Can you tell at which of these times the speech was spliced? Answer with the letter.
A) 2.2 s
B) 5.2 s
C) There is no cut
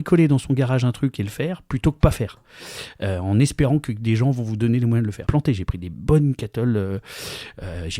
B